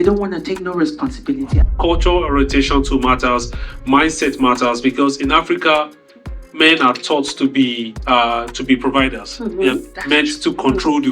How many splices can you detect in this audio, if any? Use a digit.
1